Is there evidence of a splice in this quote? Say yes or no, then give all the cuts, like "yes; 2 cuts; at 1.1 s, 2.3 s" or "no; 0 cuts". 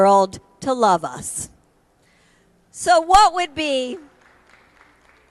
no; 0 cuts